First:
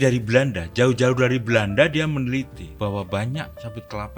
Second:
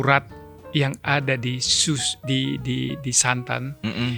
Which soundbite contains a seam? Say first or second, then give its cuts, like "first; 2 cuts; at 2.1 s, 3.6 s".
first; 1 cut; at 2.6 s